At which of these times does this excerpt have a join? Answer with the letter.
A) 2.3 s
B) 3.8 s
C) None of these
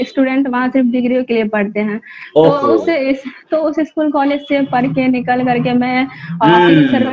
C